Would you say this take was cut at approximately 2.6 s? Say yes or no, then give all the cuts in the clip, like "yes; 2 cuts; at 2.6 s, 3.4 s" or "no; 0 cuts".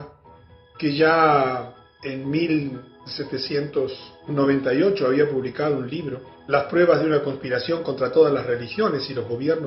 yes; 1 cut; at 2.6 s